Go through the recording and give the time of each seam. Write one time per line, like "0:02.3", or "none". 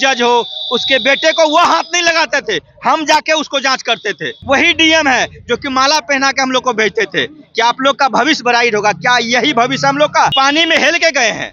0:04.3
0:10.3